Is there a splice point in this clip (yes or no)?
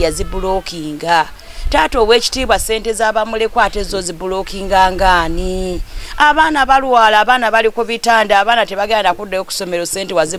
no